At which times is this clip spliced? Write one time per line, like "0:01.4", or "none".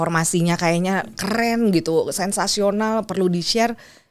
none